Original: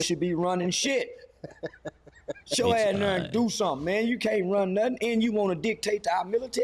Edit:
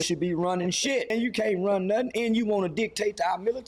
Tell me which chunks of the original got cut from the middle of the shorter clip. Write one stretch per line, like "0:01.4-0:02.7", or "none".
0:01.1-0:04.0